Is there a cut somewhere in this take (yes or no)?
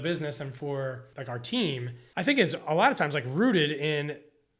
yes